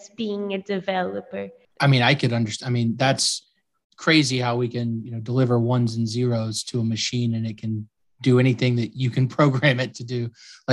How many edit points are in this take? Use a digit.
1